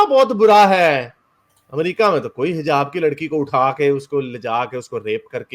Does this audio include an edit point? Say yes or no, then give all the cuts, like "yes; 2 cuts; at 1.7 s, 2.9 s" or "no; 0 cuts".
no; 0 cuts